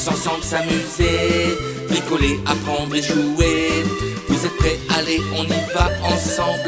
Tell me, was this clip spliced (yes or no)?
no